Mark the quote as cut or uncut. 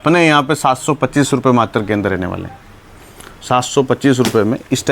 uncut